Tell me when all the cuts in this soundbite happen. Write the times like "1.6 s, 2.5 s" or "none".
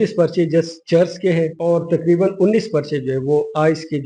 1.5 s